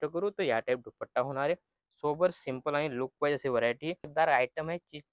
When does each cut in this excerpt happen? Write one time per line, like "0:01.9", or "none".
0:04.1